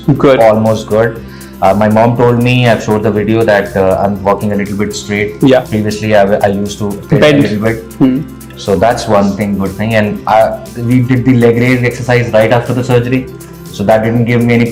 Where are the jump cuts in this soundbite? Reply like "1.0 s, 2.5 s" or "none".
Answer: none